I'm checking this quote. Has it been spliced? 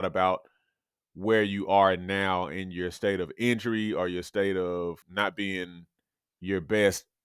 yes; 1 cut; at 5.0 s

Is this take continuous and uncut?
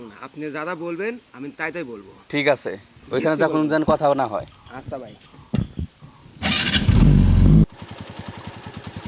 no; 1 cut; at 7.6 s

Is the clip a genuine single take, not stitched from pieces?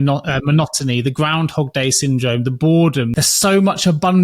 no; 1 cut; at 3.1 s

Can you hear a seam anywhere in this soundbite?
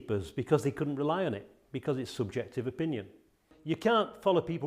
yes; 1 cut; at 3.5 s

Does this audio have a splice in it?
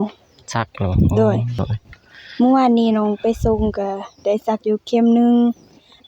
yes; 1 cut; at 1.6 s

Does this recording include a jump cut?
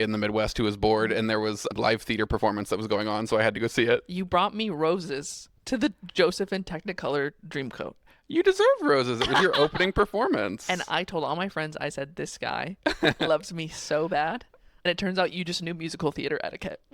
yes; 2 cuts; at 1.7 s, 14.8 s

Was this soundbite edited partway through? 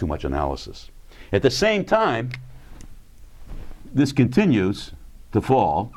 yes; 1 cut; at 3.8 s

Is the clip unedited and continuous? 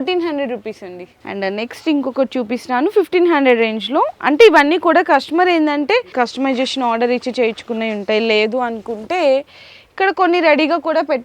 yes; 0 cuts

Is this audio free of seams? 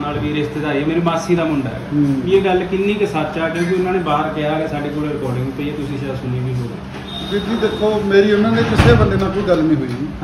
yes; 0 cuts

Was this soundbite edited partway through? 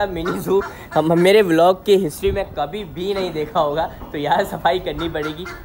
no; 0 cuts

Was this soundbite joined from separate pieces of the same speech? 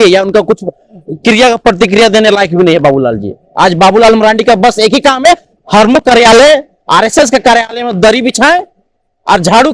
no; 0 cuts

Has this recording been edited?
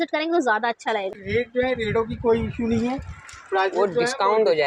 yes; 1 cut; at 1.2 s

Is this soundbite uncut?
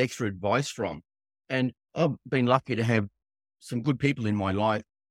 yes; 0 cuts

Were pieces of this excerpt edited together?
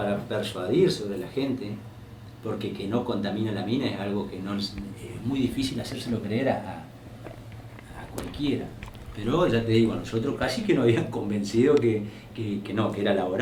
no; 0 cuts

